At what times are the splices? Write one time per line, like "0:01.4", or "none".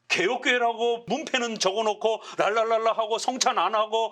0:01.0

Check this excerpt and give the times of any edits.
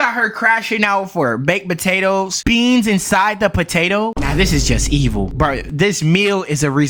none

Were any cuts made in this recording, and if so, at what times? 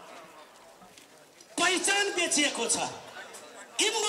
none

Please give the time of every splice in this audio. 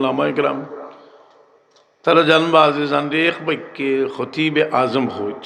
none

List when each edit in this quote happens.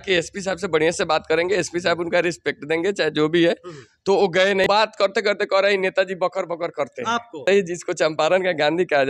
0:04.6
0:07.4

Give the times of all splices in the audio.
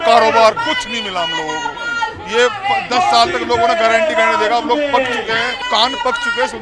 0:05.6

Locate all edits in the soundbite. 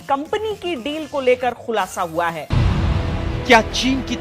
0:02.5

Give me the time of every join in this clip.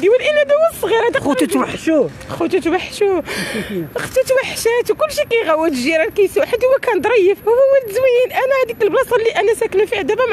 none

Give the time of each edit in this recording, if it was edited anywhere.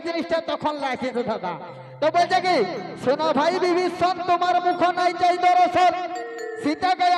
none

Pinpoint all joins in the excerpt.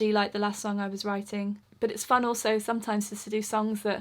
0:01.7

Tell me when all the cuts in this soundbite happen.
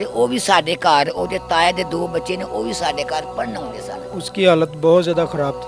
0:03.9

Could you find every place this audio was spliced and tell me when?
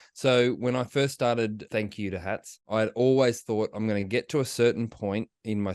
0:01.6
0:02.7

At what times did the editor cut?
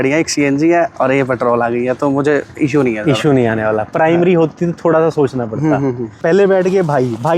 0:06.1

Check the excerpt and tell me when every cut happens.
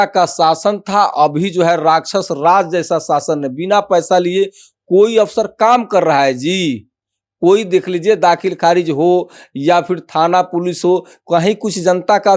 none

